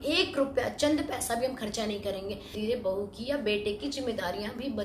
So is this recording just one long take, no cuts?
no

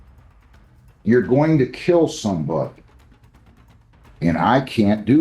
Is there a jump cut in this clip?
yes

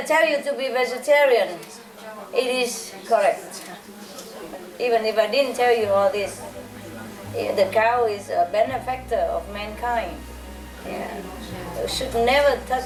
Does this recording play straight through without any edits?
yes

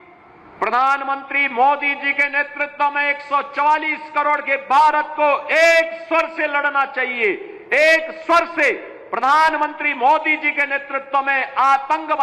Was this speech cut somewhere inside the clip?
no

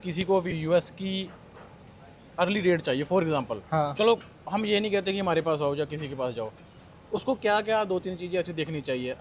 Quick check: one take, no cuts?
yes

